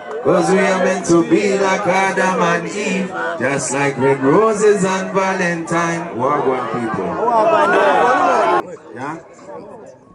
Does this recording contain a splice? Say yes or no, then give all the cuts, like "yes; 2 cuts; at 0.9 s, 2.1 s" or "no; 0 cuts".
yes; 1 cut; at 8.7 s